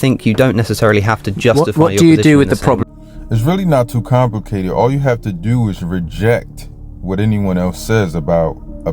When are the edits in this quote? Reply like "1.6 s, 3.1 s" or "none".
2.9 s